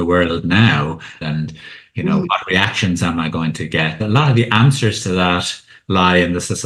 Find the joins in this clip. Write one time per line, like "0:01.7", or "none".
0:01.2
0:04.0